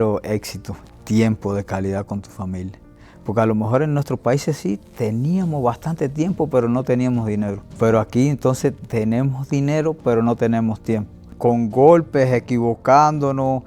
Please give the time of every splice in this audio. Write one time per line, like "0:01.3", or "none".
0:07.6
0:11.2